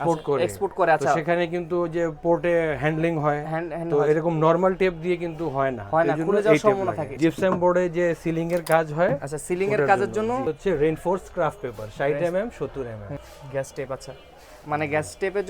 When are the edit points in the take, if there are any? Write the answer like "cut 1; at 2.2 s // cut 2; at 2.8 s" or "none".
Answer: cut 1; at 7.1 s // cut 2; at 10.4 s // cut 3; at 13.3 s